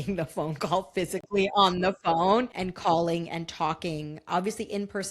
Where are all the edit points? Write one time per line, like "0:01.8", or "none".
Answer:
0:02.6